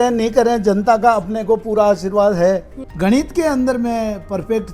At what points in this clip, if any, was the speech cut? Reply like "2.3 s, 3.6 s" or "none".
2.8 s